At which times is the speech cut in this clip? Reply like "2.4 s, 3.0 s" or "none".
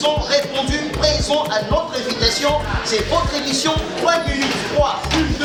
none